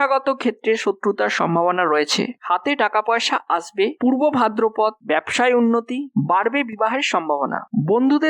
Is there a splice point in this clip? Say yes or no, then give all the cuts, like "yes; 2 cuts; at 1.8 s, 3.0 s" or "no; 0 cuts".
yes; 2 cuts; at 2.4 s, 4.0 s